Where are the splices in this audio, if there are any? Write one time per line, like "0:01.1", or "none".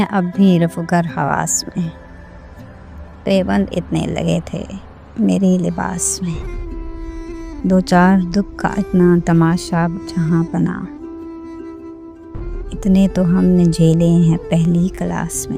0:05.1